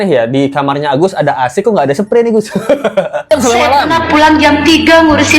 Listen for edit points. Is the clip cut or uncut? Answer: cut